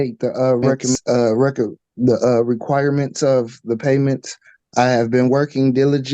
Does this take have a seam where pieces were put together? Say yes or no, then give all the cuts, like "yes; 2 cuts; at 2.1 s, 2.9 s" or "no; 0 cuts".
yes; 1 cut; at 1.0 s